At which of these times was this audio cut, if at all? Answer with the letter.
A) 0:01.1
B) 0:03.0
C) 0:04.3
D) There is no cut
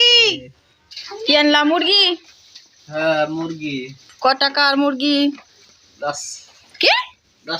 A